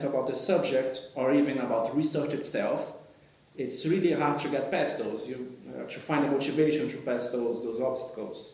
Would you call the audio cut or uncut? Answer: uncut